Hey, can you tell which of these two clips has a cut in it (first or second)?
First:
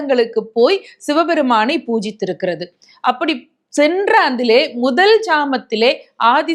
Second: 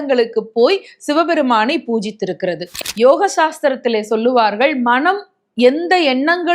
second